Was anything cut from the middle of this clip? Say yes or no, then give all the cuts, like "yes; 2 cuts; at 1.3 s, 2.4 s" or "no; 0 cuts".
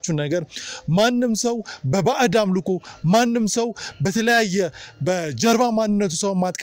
no; 0 cuts